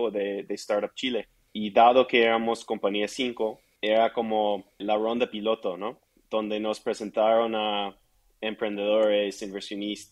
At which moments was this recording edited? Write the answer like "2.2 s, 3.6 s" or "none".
1.4 s, 3.7 s, 4.8 s